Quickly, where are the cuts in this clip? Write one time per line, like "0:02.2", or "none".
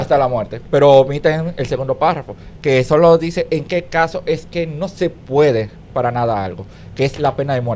none